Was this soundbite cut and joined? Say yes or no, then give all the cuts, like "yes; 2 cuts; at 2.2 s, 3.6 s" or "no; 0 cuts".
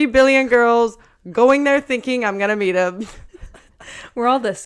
no; 0 cuts